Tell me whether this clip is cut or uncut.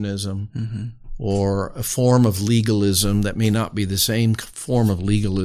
uncut